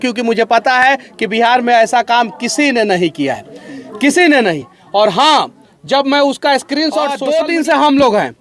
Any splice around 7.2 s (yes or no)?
yes